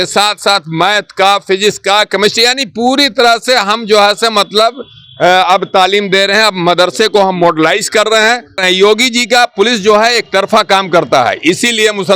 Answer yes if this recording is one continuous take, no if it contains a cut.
no